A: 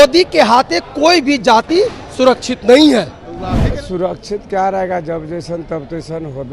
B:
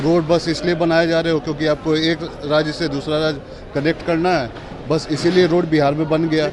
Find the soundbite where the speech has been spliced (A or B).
A